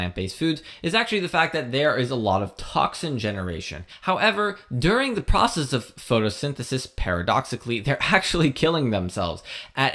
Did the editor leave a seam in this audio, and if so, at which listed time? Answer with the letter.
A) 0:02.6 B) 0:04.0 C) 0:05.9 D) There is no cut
B